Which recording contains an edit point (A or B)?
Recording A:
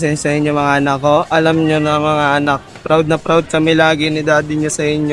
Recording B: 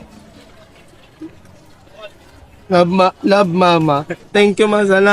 B